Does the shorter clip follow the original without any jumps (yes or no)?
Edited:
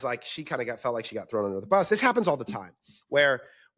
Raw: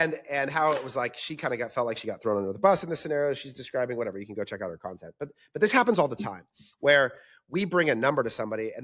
no